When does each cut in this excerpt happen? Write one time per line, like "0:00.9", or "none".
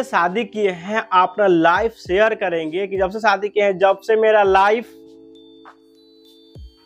none

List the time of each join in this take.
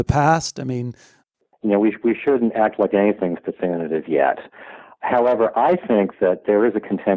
0:01.1

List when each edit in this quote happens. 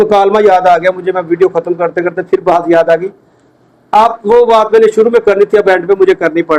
none

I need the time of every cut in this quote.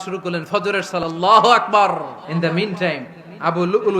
0:01.0
0:02.2

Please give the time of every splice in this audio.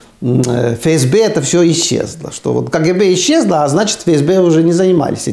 none

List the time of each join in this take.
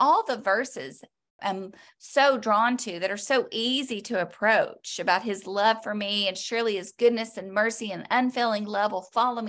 0:01.3

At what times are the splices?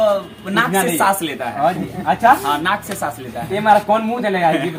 none

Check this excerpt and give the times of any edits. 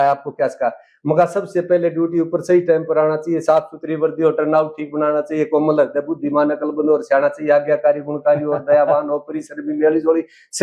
none

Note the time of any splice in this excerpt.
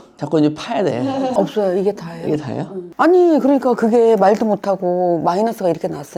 0:01.3

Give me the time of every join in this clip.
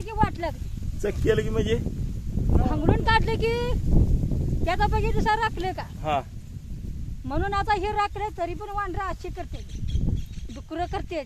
none

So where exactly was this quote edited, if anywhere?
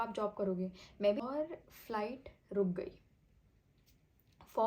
0:01.2

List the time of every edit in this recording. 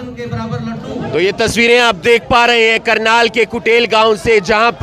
0:01.0

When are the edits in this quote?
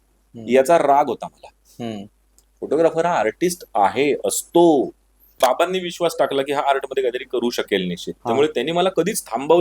0:05.2

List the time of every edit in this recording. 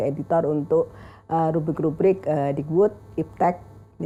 none

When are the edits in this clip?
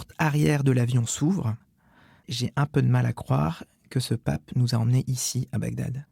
none

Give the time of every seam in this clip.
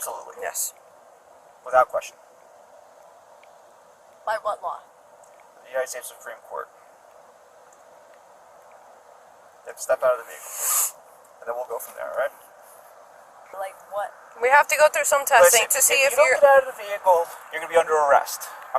0:13.6

